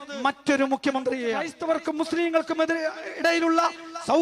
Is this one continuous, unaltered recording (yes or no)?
no